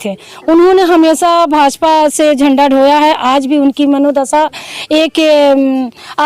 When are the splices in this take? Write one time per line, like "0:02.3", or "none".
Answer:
none